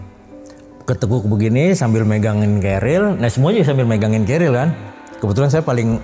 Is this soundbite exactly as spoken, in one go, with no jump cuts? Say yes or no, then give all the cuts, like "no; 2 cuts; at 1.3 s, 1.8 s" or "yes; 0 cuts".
yes; 0 cuts